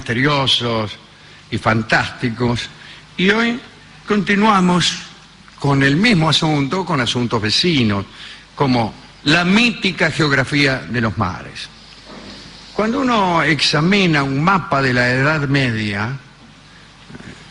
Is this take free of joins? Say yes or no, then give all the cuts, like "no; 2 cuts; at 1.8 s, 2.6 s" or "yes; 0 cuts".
no; 1 cut; at 15.0 s